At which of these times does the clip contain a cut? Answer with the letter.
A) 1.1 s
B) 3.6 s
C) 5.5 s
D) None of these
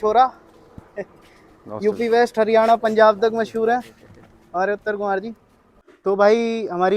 D